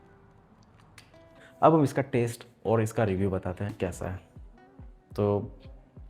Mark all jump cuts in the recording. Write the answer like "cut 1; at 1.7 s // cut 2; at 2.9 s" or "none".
cut 1; at 1.4 s

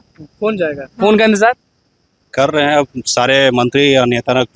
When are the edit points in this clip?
none

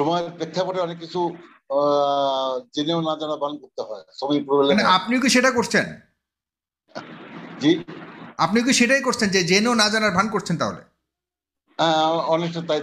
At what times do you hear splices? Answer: none

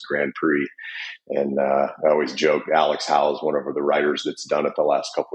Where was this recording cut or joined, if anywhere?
none

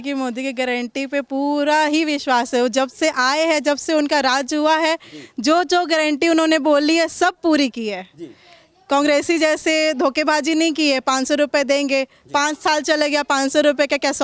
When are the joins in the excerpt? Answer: none

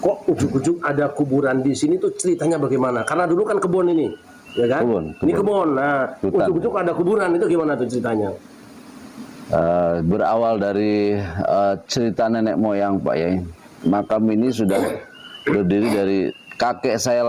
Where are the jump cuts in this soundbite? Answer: none

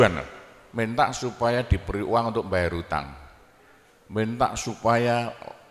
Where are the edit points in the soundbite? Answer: none

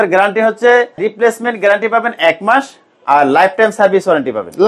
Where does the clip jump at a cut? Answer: cut 1; at 1.1 s

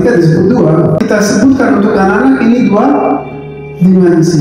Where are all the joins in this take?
cut 1; at 1.0 s

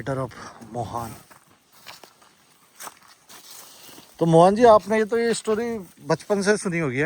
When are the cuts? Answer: cut 1; at 3.3 s

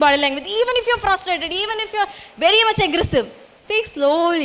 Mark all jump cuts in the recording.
none

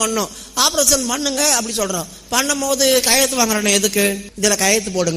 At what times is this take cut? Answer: cut 1; at 4.3 s

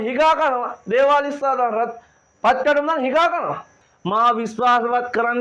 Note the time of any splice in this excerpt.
cut 1; at 3.8 s

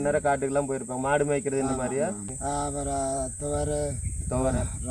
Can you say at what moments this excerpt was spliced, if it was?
cut 1; at 2.3 s

